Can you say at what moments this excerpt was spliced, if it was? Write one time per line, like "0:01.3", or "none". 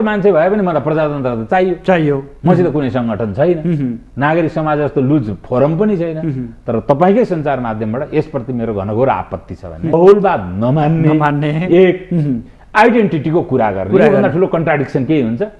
0:09.9

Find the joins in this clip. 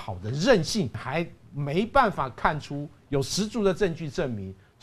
0:00.9

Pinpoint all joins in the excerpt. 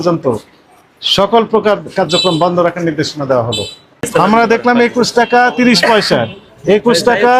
0:04.0

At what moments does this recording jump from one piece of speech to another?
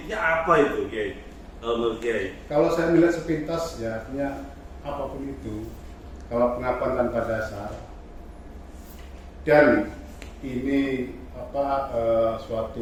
none

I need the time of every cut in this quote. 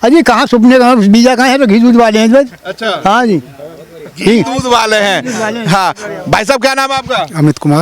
none

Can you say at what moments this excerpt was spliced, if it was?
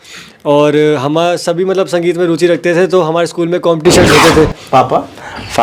0:04.6

